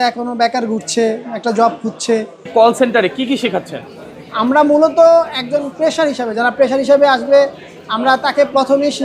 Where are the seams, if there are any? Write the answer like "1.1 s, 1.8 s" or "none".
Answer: 2.5 s